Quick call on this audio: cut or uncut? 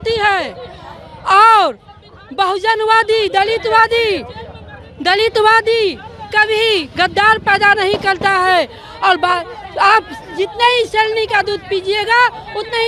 uncut